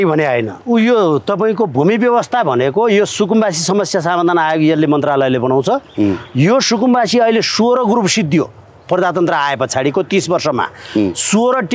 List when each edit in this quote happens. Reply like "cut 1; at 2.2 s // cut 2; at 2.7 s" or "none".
none

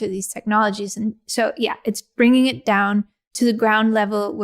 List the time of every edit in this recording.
cut 1; at 3.2 s

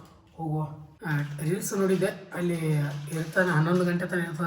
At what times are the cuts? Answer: cut 1; at 0.9 s

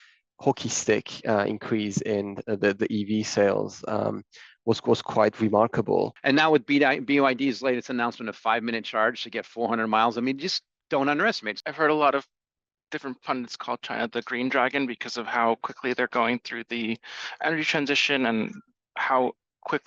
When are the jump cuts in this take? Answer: cut 1; at 6.2 s // cut 2; at 11.5 s

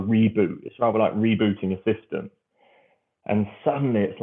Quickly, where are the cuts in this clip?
none

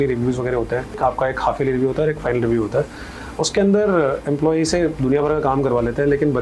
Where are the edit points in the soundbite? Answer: cut 1; at 1.0 s

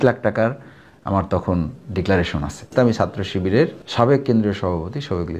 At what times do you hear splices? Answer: cut 1; at 2.7 s // cut 2; at 3.8 s

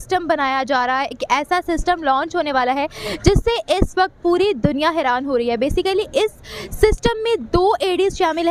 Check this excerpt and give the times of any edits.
none

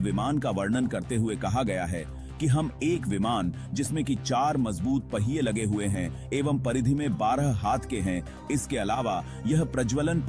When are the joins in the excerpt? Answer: none

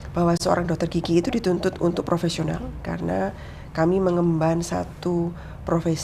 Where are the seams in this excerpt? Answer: none

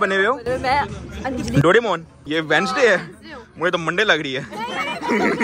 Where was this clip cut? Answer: cut 1; at 2.2 s

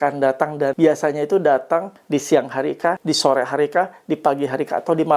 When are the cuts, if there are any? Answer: cut 1; at 0.7 s // cut 2; at 3.0 s

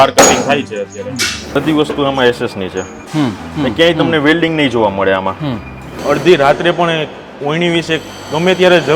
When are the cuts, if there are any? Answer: cut 1; at 1.3 s // cut 2; at 6.0 s

